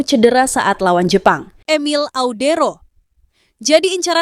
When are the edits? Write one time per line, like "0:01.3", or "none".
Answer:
0:01.5